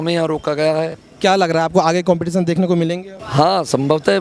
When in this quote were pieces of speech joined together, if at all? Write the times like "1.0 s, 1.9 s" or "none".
1.0 s, 3.1 s